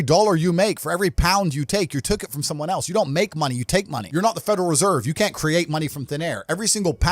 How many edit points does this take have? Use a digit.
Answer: 1